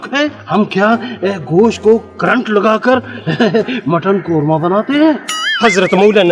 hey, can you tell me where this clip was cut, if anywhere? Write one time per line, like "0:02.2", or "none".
none